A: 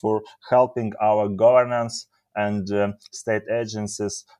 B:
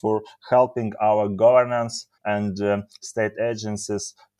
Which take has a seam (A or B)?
B